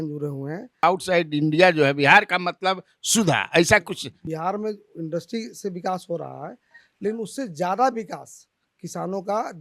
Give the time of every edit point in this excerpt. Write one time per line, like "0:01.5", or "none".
0:00.8
0:04.2